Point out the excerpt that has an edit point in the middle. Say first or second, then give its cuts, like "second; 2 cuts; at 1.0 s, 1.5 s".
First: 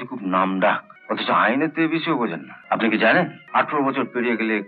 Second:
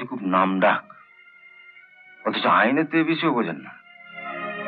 first; 3 cuts; at 0.9 s, 2.5 s, 3.4 s